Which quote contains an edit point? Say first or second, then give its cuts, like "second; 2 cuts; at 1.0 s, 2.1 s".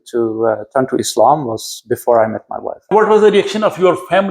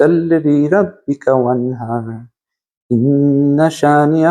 first; 1 cut; at 2.9 s